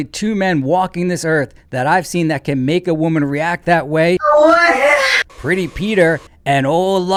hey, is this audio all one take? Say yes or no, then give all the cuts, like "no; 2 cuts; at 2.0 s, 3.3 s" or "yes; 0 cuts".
yes; 0 cuts